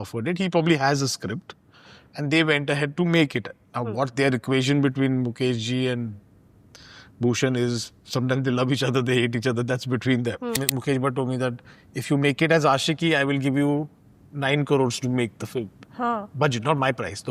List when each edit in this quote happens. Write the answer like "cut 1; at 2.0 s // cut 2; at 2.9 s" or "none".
cut 1; at 10.6 s

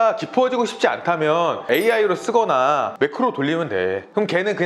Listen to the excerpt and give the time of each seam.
none

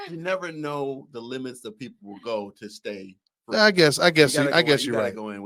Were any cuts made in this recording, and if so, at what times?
none

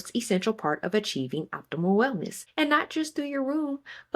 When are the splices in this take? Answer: cut 1; at 2.4 s

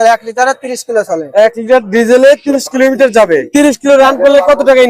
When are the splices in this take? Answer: cut 1; at 3.5 s

